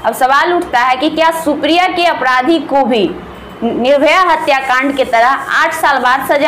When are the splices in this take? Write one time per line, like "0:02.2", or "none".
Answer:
none